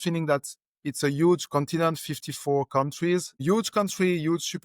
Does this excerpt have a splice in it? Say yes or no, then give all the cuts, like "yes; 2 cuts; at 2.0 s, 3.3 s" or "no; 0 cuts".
yes; 1 cut; at 3.4 s